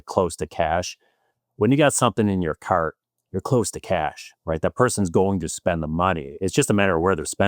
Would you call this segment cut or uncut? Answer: uncut